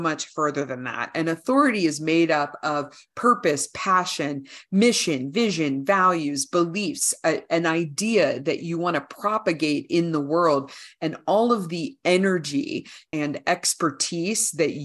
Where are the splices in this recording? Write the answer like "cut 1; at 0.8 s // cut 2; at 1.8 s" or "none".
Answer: cut 1; at 13.0 s